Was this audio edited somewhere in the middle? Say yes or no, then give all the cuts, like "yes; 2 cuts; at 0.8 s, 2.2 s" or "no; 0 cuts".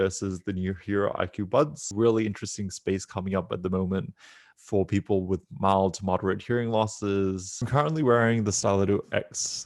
yes; 2 cuts; at 1.8 s, 7.7 s